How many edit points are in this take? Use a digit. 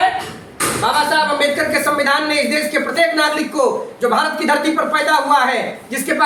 0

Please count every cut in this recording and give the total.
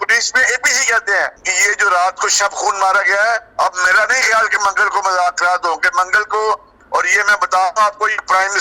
2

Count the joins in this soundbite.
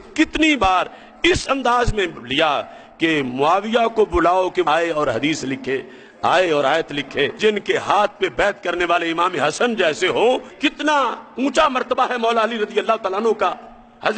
2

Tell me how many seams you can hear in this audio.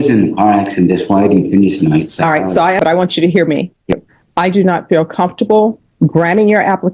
2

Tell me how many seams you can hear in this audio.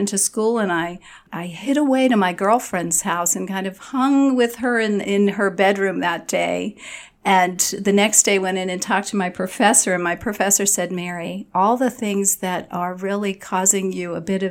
2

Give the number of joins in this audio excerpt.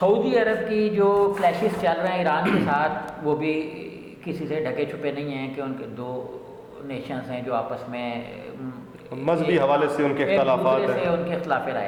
0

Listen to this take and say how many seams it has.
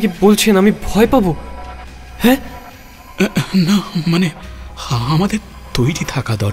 4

